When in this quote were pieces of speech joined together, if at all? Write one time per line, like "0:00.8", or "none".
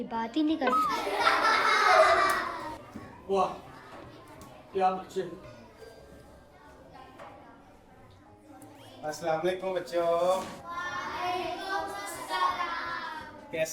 none